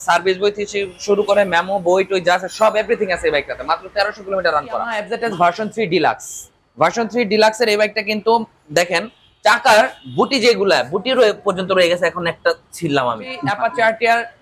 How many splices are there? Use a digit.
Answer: 2